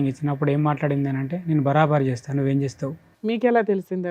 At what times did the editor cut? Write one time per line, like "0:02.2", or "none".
0:03.1